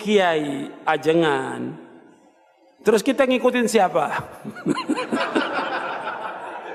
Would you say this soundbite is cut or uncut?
uncut